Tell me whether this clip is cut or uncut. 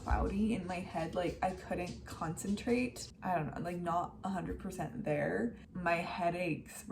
cut